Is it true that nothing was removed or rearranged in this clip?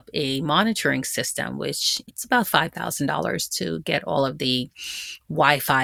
yes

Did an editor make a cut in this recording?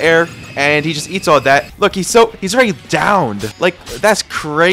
yes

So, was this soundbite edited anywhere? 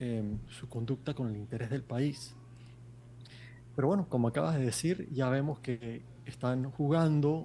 no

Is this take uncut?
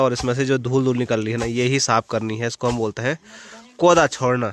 yes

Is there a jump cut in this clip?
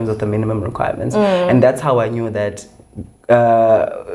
no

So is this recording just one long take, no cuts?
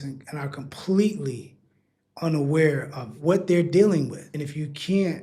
no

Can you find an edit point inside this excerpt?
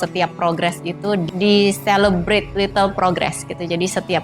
yes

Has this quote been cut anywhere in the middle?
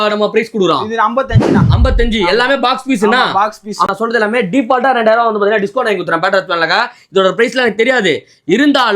yes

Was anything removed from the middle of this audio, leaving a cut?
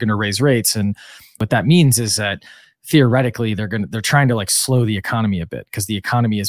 yes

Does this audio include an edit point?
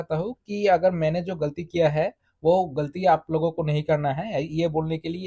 no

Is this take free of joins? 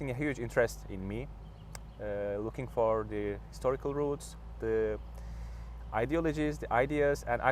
yes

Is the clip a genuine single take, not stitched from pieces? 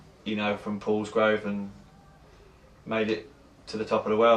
no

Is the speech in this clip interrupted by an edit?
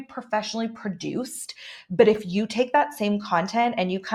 no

